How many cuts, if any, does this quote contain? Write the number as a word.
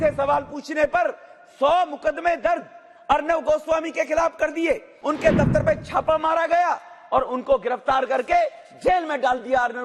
one